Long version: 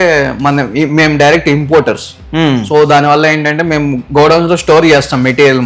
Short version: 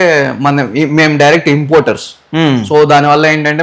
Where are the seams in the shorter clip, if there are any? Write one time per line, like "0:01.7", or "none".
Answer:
none